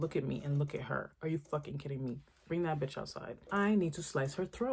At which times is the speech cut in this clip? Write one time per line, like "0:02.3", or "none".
0:03.5